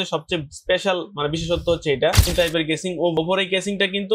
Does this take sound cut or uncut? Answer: cut